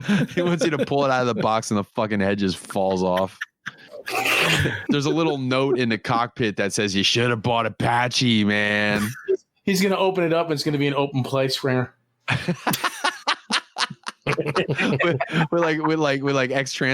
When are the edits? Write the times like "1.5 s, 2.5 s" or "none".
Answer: 4.8 s